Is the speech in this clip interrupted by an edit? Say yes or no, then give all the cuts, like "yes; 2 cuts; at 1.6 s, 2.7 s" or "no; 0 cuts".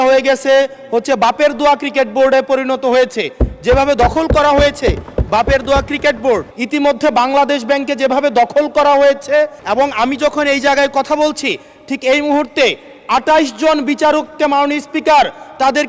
yes; 2 cuts; at 6.5 s, 9.6 s